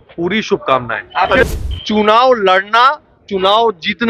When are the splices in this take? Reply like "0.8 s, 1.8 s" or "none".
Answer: 1.4 s